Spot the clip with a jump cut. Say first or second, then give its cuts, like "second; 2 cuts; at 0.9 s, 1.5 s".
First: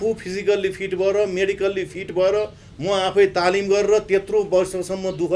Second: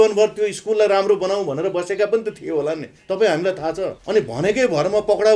second; 1 cut; at 4.0 s